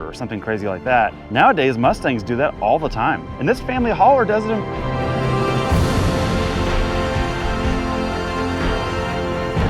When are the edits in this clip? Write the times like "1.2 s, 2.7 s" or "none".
1.2 s, 3.3 s, 4.7 s